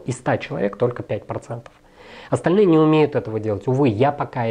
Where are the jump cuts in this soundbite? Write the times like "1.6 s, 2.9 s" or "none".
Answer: none